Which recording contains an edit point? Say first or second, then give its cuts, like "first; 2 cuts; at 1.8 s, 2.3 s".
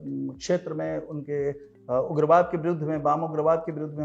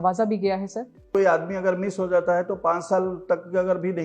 second; 1 cut; at 1.0 s